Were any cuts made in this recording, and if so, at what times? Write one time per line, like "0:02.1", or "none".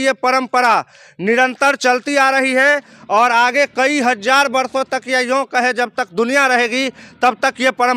none